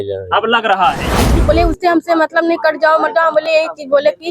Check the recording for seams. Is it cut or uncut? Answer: cut